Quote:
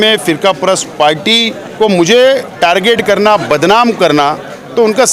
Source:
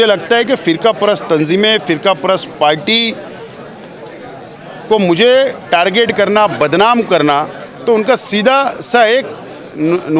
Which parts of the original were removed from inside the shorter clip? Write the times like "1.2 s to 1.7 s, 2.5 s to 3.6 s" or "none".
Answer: 3.2 s to 4.7 s